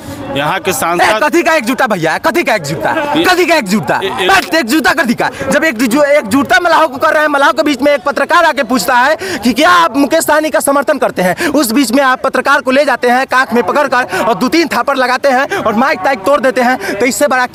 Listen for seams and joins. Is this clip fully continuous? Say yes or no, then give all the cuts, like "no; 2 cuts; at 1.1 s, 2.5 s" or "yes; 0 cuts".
yes; 0 cuts